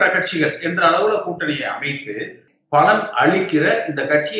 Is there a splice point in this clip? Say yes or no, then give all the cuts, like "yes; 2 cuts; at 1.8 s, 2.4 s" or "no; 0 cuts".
yes; 1 cut; at 2.5 s